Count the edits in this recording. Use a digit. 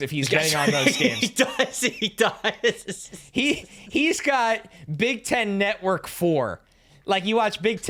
0